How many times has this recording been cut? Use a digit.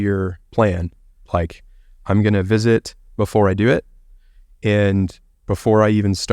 1